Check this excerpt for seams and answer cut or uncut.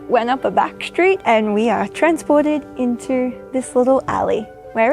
cut